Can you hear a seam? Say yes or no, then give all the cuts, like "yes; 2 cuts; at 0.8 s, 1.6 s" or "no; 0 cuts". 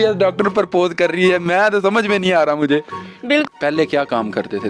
yes; 1 cut; at 3.5 s